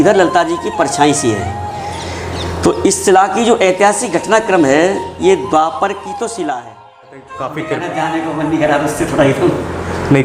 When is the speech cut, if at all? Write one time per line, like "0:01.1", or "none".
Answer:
0:07.3